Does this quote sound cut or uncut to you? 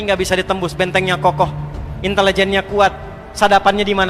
uncut